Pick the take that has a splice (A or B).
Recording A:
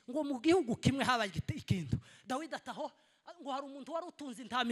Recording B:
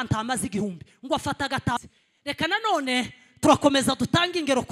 B